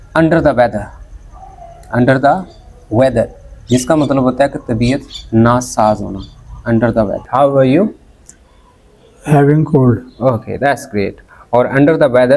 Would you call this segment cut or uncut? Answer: cut